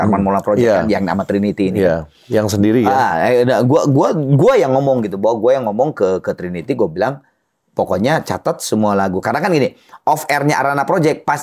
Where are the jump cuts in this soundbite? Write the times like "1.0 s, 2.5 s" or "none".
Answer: none